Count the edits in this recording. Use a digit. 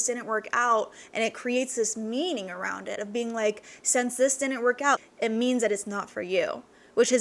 1